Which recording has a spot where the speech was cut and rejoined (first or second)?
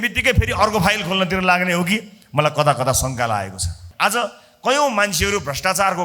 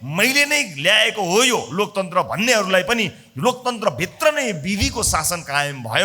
first